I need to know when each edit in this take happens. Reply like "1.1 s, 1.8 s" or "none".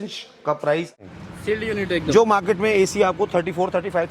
0.9 s